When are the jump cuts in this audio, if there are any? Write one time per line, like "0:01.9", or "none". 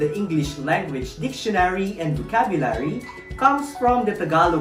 none